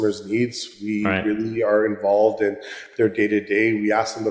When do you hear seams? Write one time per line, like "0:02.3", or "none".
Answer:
none